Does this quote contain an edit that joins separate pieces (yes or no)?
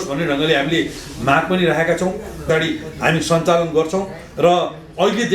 yes